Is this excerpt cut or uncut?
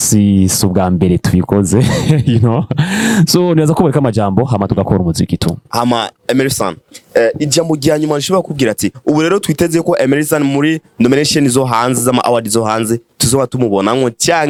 uncut